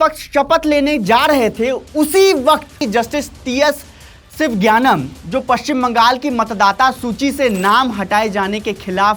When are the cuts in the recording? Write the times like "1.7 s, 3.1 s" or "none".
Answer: 2.8 s